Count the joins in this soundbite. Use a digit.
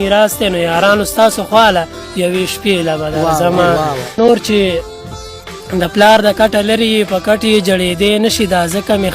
1